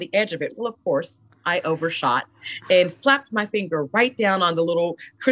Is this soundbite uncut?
yes; 0 cuts

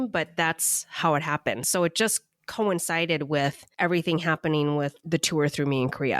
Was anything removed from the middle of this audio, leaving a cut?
yes; 2 cuts; at 3.6 s, 5.0 s

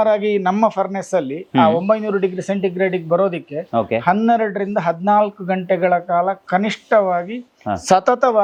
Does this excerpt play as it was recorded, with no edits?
yes; 0 cuts

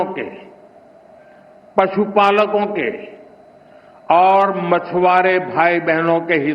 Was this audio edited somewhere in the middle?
no; 0 cuts

